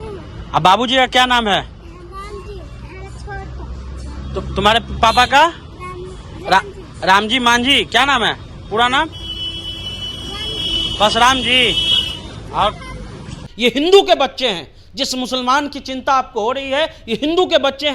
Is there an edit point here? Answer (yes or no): yes